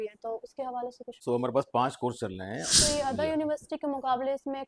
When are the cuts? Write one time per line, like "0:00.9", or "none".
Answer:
0:01.1
0:02.7